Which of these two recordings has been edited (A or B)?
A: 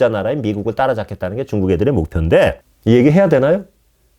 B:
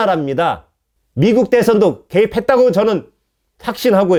A